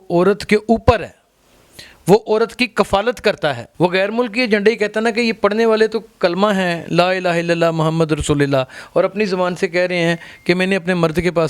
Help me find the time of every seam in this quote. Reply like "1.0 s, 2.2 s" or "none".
3.6 s